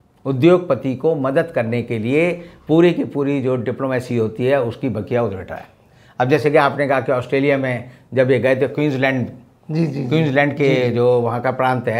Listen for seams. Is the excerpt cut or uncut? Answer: uncut